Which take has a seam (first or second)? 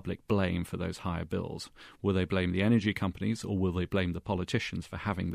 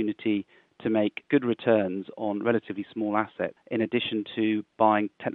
second